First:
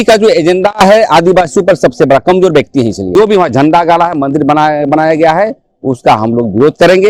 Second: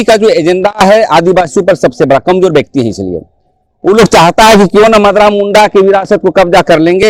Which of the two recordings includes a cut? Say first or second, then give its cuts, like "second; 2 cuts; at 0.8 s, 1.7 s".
first; 1 cut; at 3.1 s